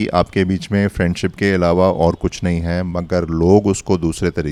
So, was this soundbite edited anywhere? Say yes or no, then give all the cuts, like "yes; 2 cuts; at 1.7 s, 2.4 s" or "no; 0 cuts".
no; 0 cuts